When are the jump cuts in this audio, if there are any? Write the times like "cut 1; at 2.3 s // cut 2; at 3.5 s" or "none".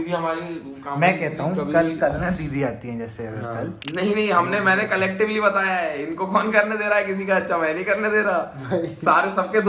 cut 1; at 3.8 s